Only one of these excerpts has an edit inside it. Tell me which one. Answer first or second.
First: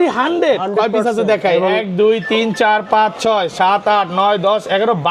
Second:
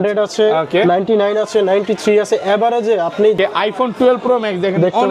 second